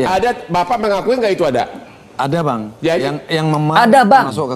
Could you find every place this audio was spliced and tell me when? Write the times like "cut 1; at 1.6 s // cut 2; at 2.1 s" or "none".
none